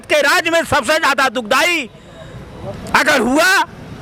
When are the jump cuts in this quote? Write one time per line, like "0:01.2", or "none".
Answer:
none